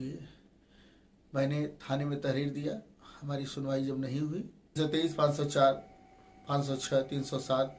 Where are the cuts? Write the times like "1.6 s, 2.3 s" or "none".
4.8 s